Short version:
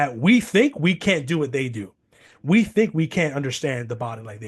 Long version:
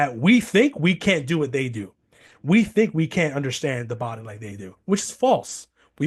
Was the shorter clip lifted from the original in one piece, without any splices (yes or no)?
yes